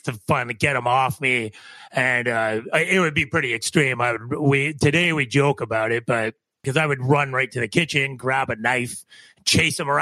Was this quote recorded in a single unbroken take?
no; 1 cut; at 6.6 s

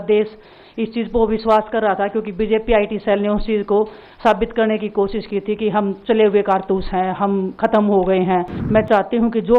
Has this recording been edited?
yes; 1 cut; at 8.6 s

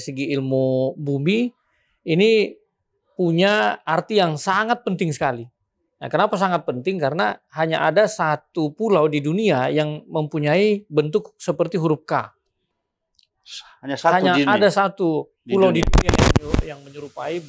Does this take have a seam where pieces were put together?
no; 0 cuts

